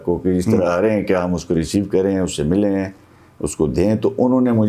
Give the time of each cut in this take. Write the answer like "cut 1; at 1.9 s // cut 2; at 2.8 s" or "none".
none